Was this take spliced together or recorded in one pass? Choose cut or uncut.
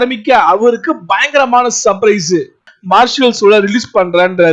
cut